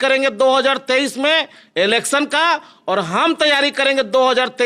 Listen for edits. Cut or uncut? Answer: uncut